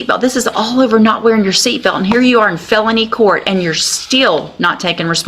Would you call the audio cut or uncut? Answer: uncut